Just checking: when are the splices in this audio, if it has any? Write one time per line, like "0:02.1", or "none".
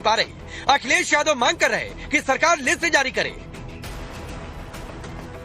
0:03.2